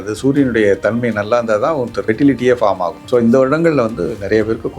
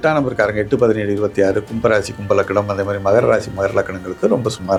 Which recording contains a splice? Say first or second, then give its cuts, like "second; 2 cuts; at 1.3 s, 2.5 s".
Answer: first; 2 cuts; at 2.0 s, 2.9 s